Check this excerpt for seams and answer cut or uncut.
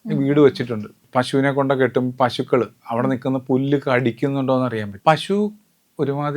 cut